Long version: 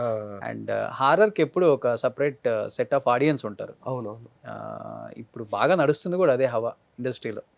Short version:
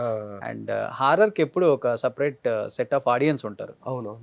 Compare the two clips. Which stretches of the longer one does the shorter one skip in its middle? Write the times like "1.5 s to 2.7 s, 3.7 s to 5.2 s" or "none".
none